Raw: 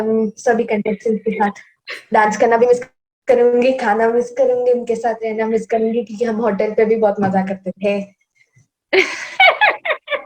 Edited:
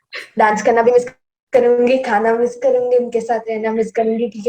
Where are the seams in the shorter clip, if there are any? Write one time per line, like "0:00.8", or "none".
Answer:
none